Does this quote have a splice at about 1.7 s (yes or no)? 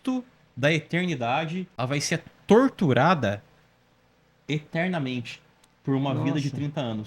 yes